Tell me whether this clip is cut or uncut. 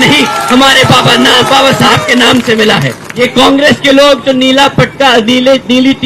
cut